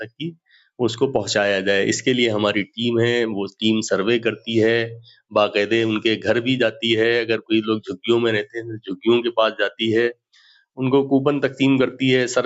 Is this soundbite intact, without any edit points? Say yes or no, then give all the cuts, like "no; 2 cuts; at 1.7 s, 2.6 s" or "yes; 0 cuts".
yes; 0 cuts